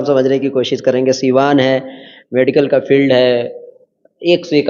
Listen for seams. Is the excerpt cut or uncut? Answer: uncut